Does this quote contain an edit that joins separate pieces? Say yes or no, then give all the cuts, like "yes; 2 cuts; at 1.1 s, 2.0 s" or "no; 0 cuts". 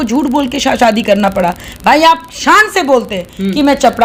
no; 0 cuts